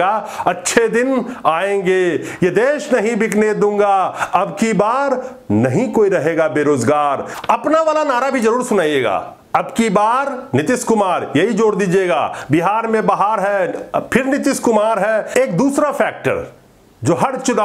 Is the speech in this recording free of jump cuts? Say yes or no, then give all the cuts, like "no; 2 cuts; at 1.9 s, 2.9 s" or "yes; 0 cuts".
no; 2 cuts; at 7.3 s, 15.3 s